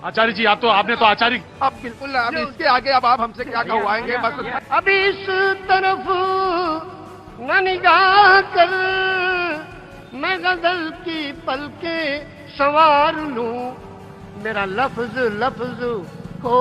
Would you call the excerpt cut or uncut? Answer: cut